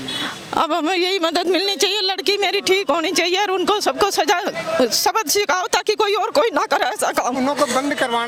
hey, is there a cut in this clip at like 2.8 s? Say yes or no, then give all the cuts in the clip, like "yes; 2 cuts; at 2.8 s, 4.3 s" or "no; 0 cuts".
no; 0 cuts